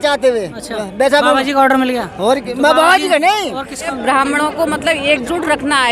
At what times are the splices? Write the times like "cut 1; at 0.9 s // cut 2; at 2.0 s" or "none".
cut 1; at 4.0 s